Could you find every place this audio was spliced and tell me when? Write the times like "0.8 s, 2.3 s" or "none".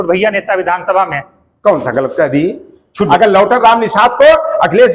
3.0 s